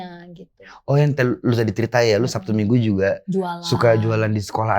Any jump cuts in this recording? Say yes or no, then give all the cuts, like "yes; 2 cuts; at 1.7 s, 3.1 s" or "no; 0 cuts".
no; 0 cuts